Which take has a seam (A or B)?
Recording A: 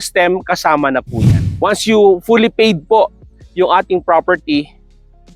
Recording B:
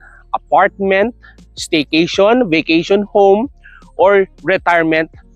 A